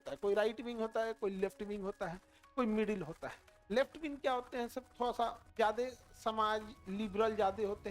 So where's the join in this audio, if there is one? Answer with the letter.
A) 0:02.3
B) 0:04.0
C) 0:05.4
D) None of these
C